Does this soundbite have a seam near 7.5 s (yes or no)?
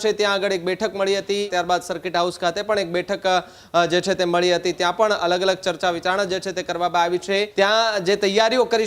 yes